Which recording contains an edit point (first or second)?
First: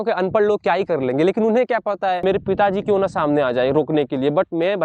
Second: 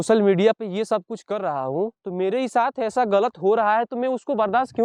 first